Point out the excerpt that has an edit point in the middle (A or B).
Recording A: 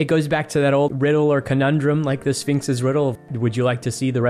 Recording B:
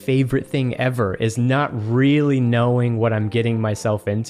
A